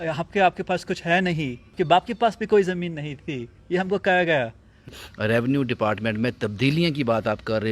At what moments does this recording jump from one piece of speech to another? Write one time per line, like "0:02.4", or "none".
0:01.7
0:05.0